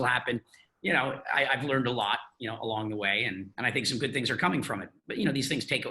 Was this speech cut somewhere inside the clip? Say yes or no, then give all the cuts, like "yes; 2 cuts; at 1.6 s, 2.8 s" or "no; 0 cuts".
yes; 1 cut; at 3.5 s